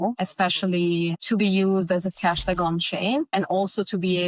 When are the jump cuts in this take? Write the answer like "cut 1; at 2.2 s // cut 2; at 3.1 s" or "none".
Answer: cut 1; at 3.3 s